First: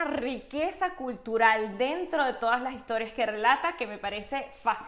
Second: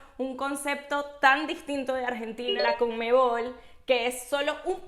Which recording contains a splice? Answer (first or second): second